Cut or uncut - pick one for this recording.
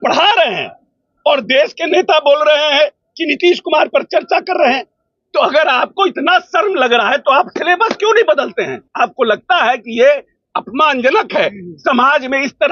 cut